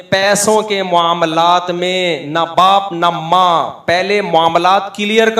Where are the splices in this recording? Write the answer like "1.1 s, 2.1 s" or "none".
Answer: none